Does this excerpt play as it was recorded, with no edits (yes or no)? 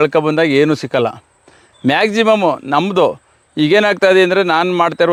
yes